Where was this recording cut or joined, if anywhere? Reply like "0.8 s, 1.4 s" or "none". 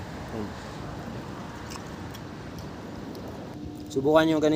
3.5 s